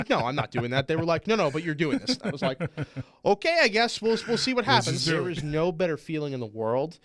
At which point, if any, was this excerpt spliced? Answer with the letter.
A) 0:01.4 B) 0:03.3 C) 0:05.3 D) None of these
C